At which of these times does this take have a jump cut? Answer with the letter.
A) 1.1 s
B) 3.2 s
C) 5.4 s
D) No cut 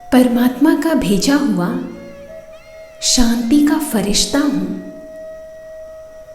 C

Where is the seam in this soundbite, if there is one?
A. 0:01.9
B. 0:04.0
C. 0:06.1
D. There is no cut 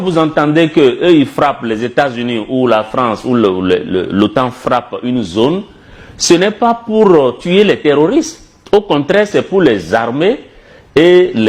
D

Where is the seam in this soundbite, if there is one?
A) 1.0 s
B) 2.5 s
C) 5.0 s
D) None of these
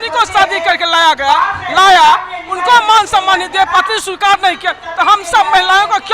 D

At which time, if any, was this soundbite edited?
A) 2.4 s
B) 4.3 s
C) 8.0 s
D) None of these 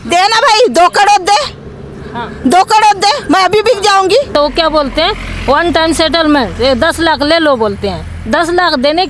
B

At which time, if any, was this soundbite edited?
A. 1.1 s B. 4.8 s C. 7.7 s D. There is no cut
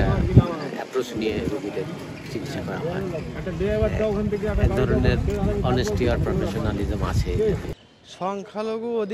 C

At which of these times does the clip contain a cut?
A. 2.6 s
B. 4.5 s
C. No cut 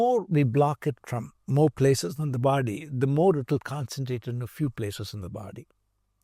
C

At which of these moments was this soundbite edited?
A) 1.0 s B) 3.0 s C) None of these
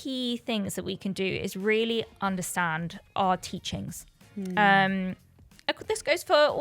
B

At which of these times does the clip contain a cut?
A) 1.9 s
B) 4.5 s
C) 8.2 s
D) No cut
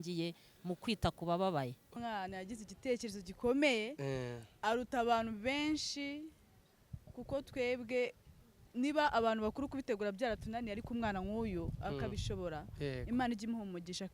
A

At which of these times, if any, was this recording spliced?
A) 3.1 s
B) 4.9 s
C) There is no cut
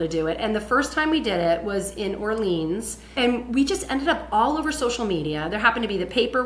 A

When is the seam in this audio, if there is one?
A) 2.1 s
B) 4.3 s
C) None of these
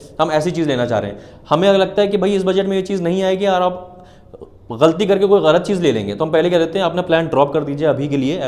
C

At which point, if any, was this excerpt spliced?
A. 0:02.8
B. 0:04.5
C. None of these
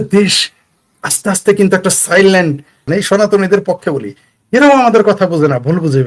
A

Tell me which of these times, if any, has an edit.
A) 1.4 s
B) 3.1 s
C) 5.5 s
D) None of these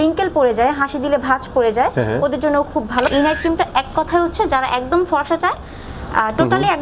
B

